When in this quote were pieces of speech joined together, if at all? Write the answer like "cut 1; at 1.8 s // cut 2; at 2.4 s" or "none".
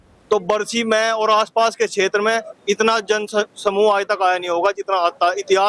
none